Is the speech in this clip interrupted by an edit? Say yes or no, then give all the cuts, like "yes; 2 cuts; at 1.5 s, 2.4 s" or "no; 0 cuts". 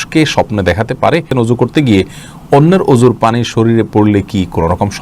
yes; 1 cut; at 1.3 s